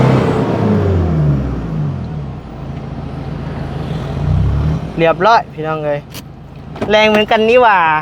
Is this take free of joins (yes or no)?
yes